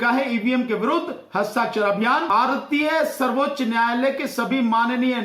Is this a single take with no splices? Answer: no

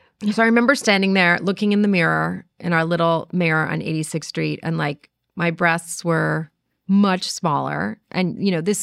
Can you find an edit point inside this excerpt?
no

